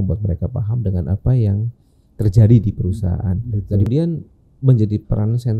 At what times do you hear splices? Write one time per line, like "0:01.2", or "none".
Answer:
0:03.9

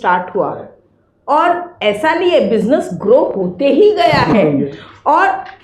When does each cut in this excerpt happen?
none

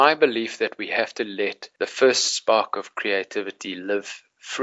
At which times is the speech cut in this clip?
0:01.6

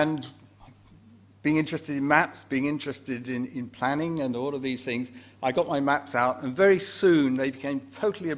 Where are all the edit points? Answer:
none

